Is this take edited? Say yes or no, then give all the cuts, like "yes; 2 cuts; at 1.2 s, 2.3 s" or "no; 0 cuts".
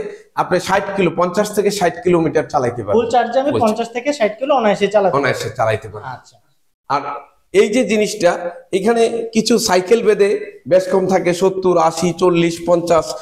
no; 0 cuts